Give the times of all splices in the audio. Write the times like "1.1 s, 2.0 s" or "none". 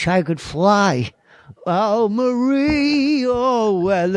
2.4 s